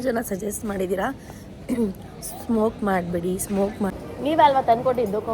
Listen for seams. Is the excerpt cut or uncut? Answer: cut